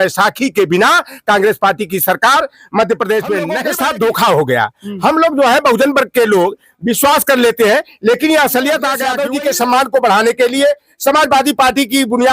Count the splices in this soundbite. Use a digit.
2